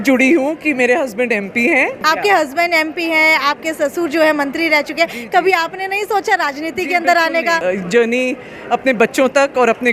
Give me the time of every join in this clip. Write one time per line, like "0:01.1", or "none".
0:02.0
0:07.6